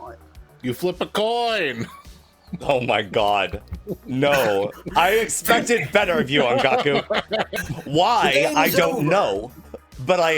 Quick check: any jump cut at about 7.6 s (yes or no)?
yes